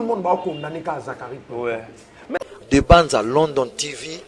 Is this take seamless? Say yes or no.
no